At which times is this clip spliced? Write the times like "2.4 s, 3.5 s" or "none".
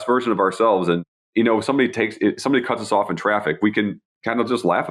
1.2 s